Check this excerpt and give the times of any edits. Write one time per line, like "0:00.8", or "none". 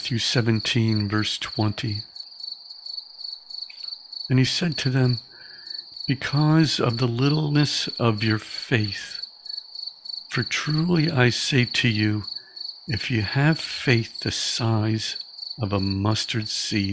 none